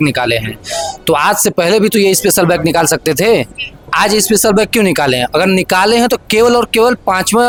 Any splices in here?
no; 0 cuts

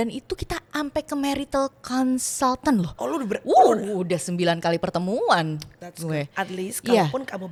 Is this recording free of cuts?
yes; 0 cuts

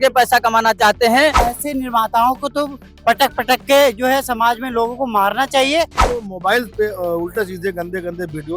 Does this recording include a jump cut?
yes; 2 cuts; at 1.5 s, 6.0 s

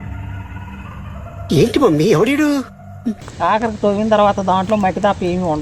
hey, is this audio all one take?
no; 1 cut; at 3.2 s

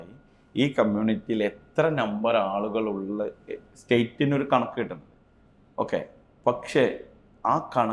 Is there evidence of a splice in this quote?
no; 0 cuts

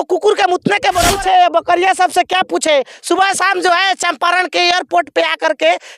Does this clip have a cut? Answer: yes; 1 cut; at 1.1 s

